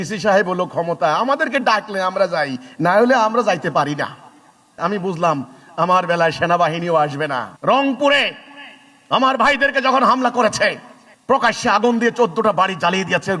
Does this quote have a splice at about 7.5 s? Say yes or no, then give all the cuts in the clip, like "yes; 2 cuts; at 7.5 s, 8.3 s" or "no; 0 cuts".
yes; 1 cut; at 7.5 s